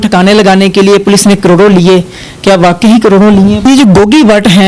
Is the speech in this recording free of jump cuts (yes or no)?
no